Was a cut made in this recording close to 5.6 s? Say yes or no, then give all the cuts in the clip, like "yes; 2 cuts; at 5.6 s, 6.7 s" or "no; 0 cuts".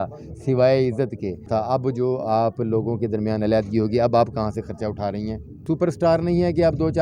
yes; 2 cuts; at 1.5 s, 5.6 s